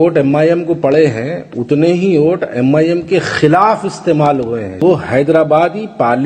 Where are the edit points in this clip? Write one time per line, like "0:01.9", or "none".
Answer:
0:04.8